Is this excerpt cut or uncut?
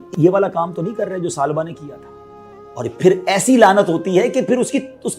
uncut